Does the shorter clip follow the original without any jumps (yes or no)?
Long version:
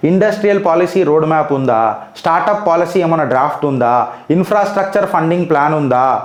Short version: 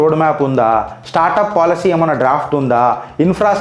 yes